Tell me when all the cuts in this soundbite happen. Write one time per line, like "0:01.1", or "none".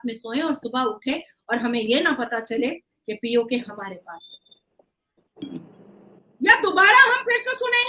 0:05.4